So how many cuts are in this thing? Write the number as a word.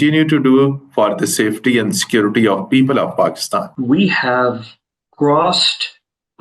one